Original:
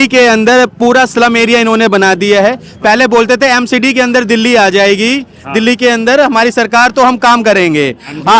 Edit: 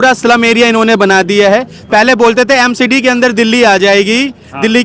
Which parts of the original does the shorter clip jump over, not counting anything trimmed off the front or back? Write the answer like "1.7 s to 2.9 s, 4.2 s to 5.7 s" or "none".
none